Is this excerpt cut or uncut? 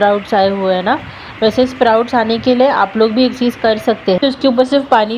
cut